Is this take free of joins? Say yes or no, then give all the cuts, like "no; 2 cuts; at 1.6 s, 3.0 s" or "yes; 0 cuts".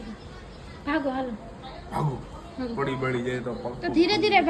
yes; 0 cuts